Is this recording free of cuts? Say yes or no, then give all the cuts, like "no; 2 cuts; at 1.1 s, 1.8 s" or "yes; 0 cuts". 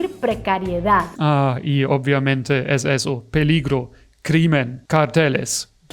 no; 1 cut; at 1.1 s